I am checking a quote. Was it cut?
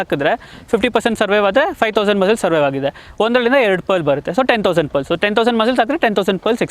no; 0 cuts

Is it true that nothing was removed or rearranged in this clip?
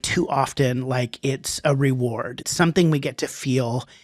no; 1 cut; at 2.4 s

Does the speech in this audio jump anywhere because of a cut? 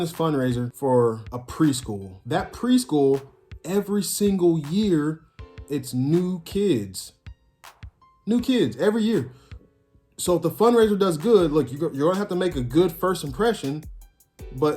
yes; 2 cuts; at 0.9 s, 2.1 s

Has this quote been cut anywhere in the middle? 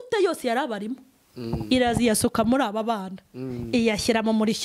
no; 0 cuts

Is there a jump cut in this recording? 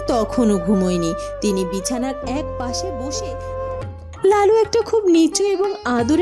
yes; 1 cut; at 3.7 s

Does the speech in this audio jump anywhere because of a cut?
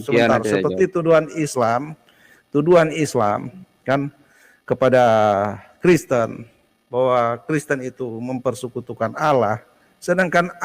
no; 0 cuts

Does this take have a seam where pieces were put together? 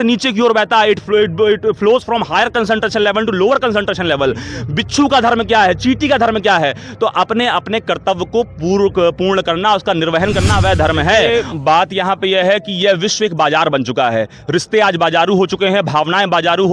yes; 1 cut; at 11.3 s

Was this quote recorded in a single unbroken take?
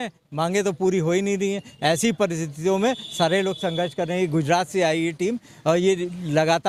yes; 0 cuts

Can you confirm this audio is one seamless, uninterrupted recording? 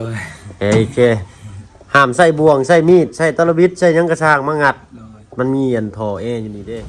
yes; 0 cuts

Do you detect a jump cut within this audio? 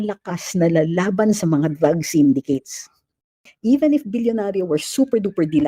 yes; 1 cut; at 3.5 s

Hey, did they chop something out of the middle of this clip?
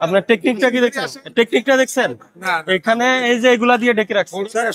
no; 0 cuts

